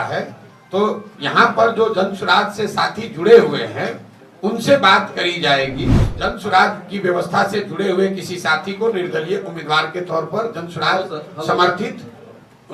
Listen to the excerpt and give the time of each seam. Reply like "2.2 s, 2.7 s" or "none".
6.0 s